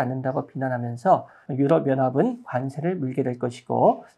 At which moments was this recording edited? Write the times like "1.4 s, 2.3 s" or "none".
1.4 s

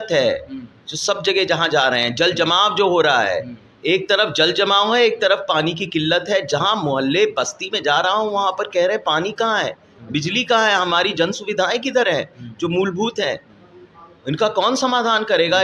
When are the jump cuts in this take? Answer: none

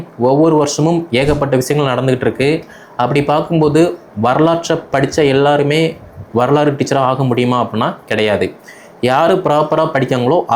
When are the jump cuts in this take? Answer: none

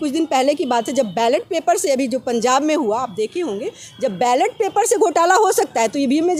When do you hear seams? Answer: none

